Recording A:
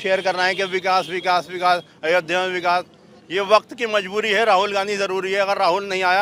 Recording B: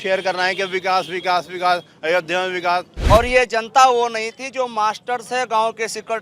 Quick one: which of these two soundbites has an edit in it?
B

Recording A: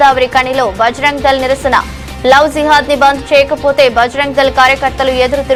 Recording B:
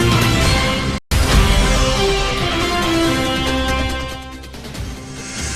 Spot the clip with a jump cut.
B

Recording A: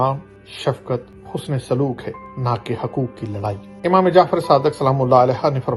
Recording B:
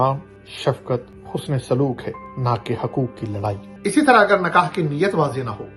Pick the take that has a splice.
B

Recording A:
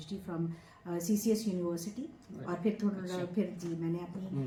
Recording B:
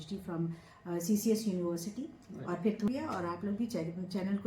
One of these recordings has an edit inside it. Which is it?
B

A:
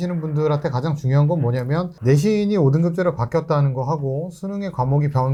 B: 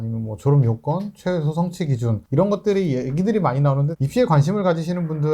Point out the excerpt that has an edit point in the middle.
B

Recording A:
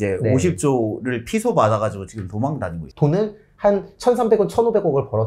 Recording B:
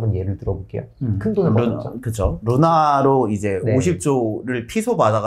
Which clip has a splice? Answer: A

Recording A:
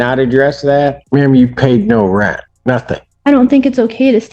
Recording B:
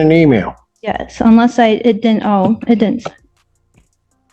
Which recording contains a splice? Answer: A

